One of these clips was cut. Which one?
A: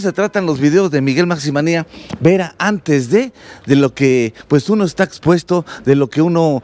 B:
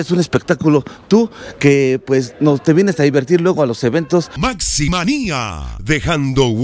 B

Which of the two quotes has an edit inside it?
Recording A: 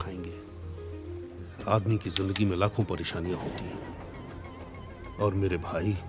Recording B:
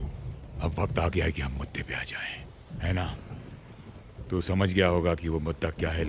A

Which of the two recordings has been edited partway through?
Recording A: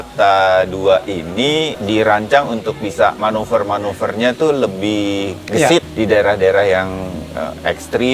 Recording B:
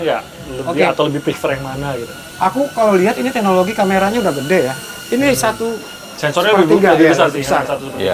A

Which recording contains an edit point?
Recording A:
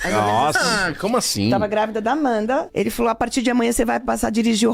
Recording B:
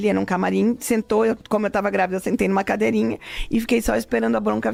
A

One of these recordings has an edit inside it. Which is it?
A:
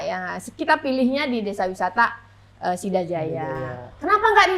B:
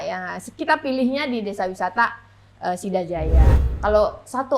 B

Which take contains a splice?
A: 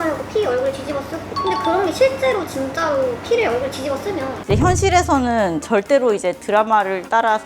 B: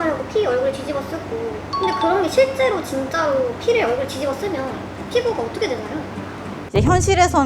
A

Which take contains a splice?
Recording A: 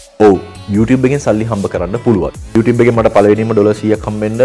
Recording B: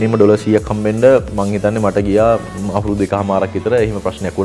A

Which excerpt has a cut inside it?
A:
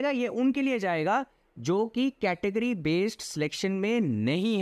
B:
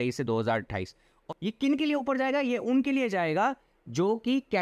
B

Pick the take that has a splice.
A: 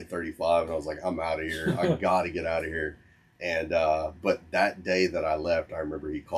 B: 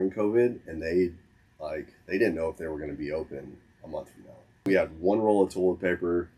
B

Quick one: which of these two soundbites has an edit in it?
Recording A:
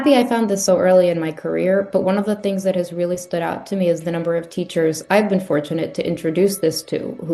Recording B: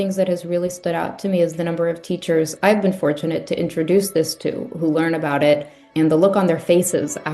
B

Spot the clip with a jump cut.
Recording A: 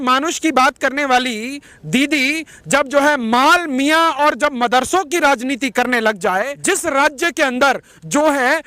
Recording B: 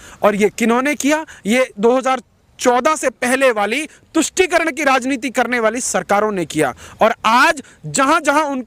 A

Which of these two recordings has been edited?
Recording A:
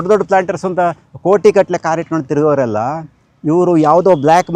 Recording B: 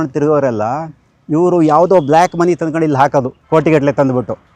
B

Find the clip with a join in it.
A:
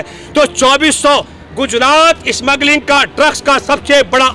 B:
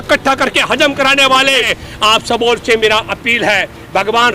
B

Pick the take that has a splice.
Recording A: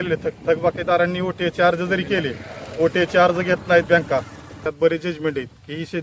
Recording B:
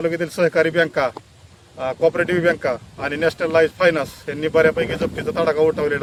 A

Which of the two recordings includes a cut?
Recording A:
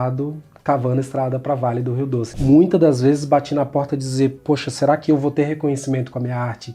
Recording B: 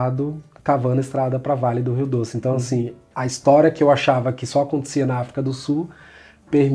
A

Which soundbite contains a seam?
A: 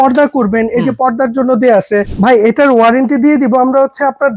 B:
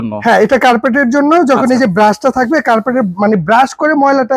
A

